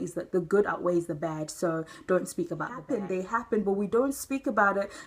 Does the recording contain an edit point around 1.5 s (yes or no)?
no